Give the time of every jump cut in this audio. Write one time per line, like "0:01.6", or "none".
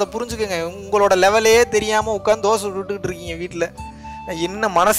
none